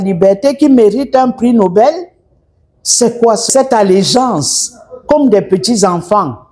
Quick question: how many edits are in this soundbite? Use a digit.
1